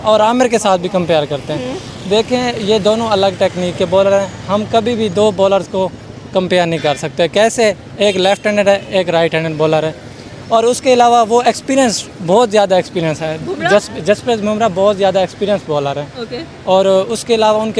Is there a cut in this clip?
no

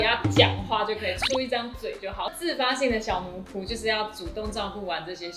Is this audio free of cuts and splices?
no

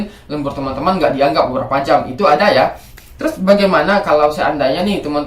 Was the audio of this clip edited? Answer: yes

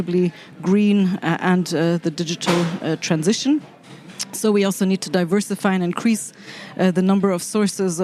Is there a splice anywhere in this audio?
no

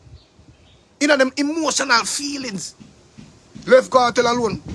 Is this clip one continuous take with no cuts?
yes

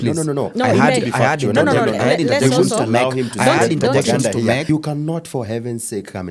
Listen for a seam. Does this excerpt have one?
yes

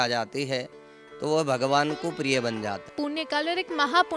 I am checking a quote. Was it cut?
yes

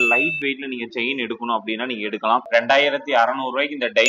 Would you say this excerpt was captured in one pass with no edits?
no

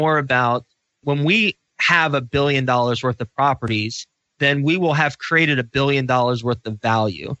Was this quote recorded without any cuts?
no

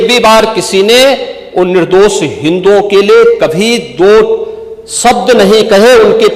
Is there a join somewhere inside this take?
no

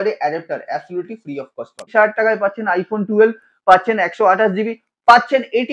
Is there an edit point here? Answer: yes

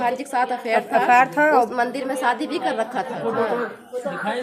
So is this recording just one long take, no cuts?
no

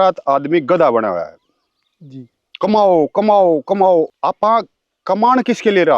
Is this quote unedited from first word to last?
no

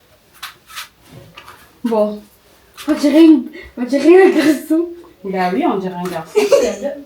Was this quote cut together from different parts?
no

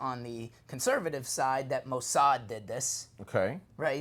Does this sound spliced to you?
no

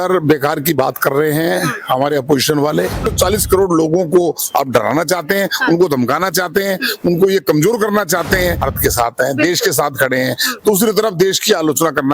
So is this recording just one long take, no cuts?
no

